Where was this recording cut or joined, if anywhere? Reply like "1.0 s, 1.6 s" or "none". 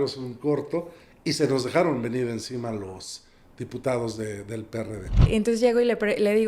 5.2 s